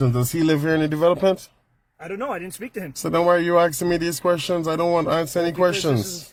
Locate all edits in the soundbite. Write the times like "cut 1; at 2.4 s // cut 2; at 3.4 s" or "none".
none